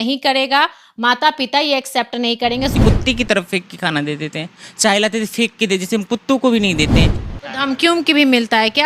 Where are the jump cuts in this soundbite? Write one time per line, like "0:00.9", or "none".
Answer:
0:02.8
0:07.2